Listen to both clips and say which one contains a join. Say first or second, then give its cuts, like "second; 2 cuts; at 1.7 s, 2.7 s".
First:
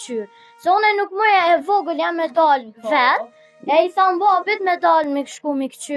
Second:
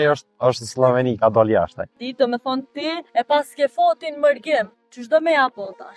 second; 2 cuts; at 2.0 s, 3.0 s